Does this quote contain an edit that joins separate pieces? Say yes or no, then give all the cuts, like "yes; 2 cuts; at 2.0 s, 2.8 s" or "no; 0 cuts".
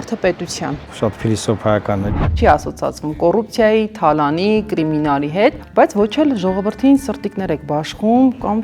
yes; 2 cuts; at 0.8 s, 2.3 s